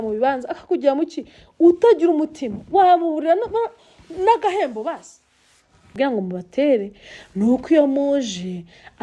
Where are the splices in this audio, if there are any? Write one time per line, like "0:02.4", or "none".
0:05.9